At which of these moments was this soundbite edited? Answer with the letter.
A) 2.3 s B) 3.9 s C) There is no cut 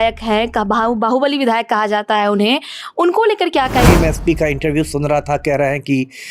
B